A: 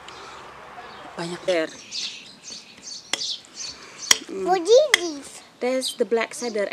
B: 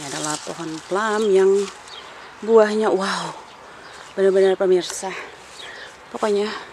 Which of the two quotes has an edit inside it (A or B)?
A